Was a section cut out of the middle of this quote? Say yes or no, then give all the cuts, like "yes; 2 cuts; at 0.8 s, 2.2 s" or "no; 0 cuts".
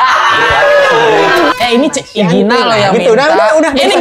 yes; 1 cut; at 1.5 s